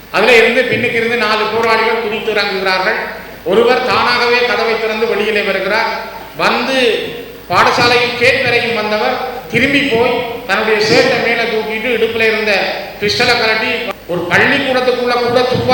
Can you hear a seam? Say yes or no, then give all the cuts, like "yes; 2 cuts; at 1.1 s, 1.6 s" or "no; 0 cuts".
yes; 1 cut; at 13.9 s